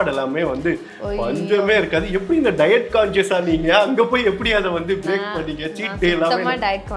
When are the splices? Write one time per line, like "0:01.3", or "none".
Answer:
none